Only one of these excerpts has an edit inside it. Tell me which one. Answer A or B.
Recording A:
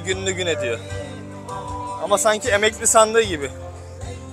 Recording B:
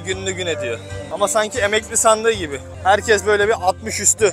B